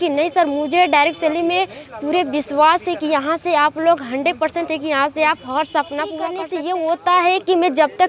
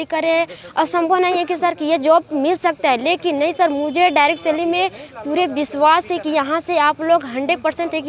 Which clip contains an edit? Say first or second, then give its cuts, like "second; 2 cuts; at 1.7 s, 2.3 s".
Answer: first; 1 cut; at 6.5 s